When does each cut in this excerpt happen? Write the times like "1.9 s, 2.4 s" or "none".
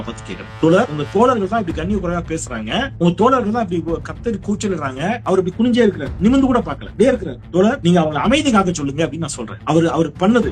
1.0 s